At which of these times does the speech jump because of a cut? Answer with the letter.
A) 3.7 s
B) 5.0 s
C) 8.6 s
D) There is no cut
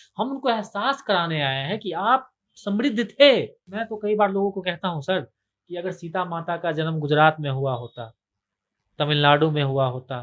A